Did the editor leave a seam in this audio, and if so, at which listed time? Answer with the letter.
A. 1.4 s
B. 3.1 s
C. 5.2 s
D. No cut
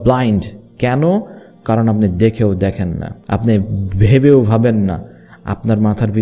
B